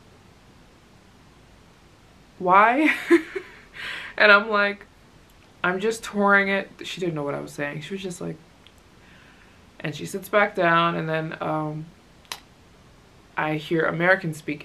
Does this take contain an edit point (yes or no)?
no